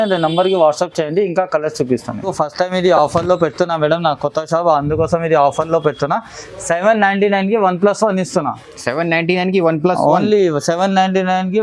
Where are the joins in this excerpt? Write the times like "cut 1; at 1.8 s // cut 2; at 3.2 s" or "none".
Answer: cut 1; at 2.3 s